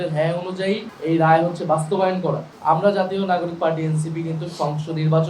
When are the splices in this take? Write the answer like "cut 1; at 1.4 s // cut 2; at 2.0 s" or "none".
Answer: cut 1; at 0.9 s // cut 2; at 2.5 s

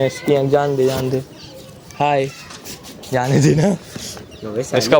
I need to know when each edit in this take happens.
none

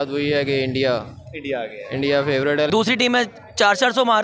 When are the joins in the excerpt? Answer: cut 1; at 2.7 s

